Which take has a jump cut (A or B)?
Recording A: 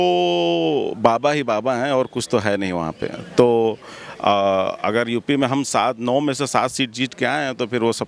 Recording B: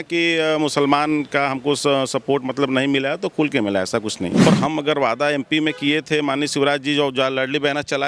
B